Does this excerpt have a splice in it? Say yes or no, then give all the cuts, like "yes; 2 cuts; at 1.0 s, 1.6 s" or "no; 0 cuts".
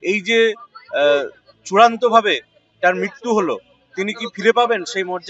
no; 0 cuts